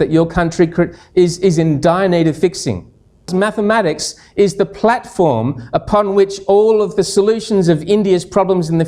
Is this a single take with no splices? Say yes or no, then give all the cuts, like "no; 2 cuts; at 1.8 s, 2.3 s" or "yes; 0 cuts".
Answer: no; 1 cut; at 3.3 s